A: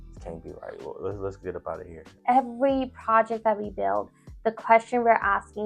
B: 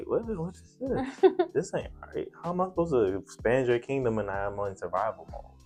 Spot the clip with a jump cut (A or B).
A